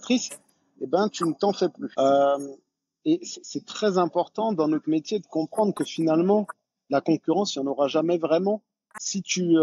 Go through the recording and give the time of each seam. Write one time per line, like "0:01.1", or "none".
0:01.8

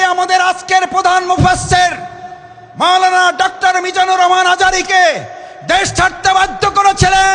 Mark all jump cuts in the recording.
none

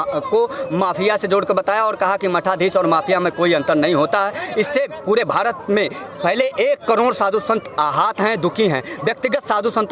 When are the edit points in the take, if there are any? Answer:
none

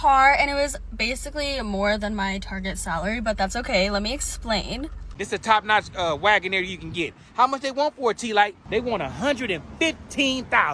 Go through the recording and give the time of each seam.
0:05.0
0:08.6

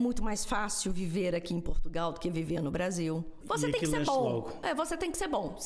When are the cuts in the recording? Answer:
0:03.4

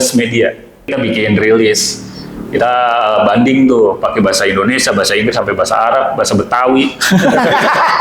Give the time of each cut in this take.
0:00.9

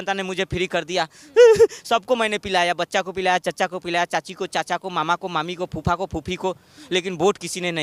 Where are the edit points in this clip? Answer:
none

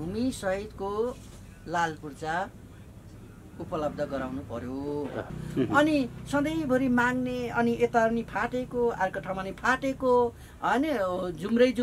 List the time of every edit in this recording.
0:05.4

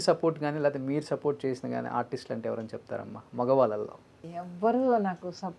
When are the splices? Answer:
0:04.2

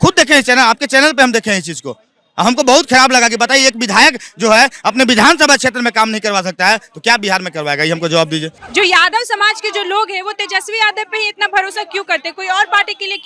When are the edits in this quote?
0:08.6

